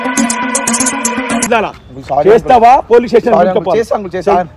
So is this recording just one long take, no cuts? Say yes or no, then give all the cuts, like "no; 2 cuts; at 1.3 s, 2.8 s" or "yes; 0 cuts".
no; 1 cut; at 1.5 s